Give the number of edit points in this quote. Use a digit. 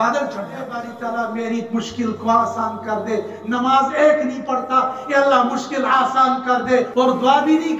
2